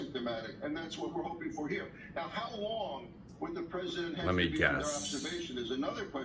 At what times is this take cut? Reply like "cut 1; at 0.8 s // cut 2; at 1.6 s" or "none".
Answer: cut 1; at 3.7 s